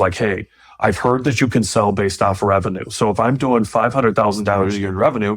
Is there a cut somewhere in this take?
no; 0 cuts

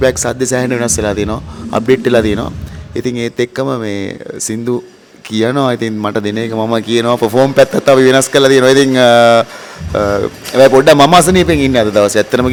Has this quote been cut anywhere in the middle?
no; 0 cuts

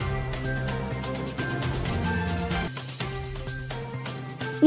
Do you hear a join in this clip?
no; 0 cuts

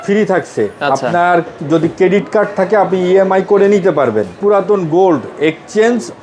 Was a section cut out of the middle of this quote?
yes; 1 cut; at 4.3 s

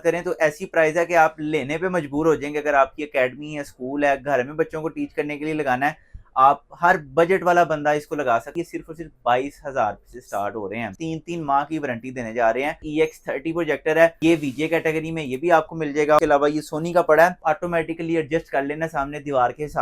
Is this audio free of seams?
no; 6 cuts; at 8.5 s, 11.0 s, 12.8 s, 14.2 s, 16.2 s, 17.4 s

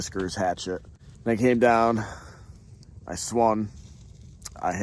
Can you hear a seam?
no; 0 cuts

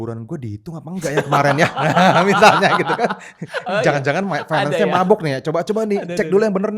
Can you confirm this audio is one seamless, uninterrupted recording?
yes; 0 cuts

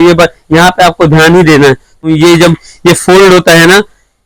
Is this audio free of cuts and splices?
no; 1 cut; at 2.1 s

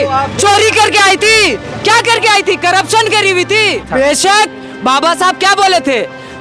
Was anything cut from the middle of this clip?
yes; 1 cut; at 3.9 s

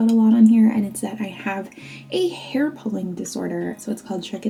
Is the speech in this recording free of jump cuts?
yes; 0 cuts

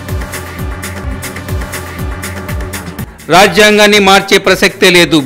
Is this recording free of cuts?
no; 1 cut; at 2.6 s

